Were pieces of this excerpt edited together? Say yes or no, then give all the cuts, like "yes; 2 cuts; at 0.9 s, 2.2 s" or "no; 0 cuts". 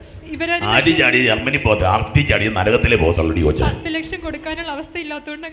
no; 0 cuts